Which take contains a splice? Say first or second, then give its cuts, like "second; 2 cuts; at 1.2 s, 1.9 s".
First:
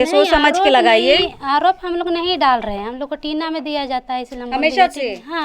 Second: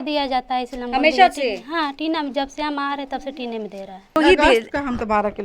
second; 1 cut; at 4.2 s